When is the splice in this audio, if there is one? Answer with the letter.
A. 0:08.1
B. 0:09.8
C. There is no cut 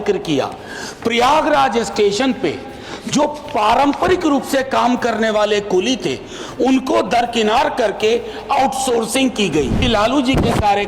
B